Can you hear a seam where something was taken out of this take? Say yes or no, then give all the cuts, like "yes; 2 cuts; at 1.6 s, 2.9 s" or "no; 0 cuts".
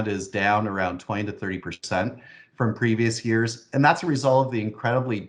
no; 0 cuts